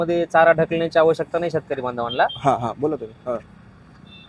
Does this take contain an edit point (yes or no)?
no